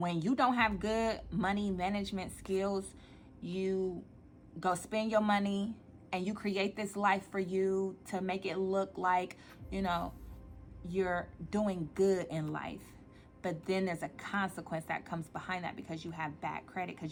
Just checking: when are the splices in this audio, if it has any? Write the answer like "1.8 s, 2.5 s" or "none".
none

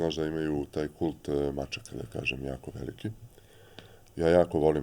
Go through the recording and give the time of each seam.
none

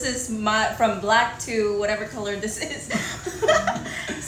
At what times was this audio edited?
none

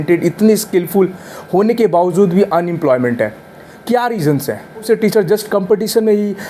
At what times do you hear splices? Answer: 4.8 s

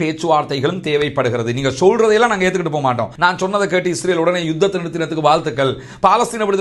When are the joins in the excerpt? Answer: 3.1 s

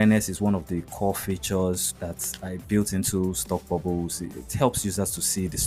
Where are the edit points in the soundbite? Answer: 2.2 s

